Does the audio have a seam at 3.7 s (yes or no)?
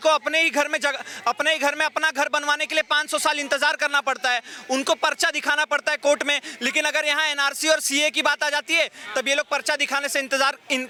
no